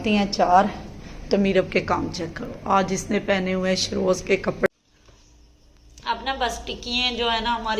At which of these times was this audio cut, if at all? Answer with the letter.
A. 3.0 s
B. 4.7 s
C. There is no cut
B